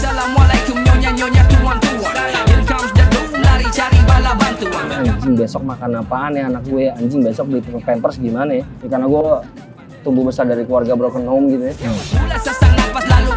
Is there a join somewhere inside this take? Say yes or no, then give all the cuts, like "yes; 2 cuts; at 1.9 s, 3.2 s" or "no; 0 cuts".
yes; 3 cuts; at 4.9 s, 8.7 s, 12.1 s